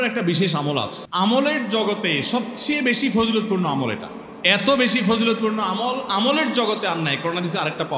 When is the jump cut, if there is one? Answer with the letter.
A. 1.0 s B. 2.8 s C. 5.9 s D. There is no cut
A